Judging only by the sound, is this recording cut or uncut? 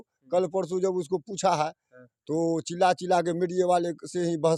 uncut